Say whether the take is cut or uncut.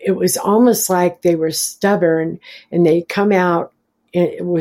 uncut